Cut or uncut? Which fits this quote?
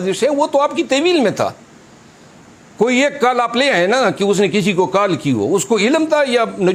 uncut